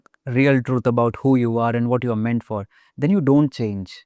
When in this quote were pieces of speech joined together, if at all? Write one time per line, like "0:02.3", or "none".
none